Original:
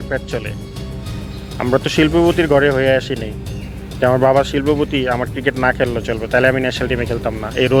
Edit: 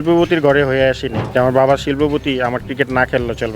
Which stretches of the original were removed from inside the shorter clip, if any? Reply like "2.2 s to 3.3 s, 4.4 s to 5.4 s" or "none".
3.2 s to 3.8 s